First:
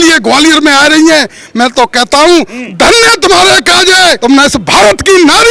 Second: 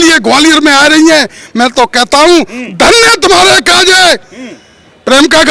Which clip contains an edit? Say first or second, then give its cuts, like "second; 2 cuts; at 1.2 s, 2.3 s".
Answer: first; 1 cut; at 4.2 s